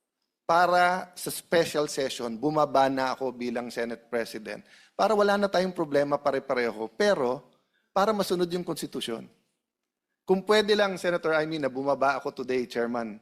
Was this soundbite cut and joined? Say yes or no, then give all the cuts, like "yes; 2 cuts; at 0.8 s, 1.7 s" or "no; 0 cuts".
no; 0 cuts